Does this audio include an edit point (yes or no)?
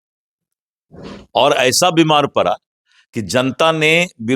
no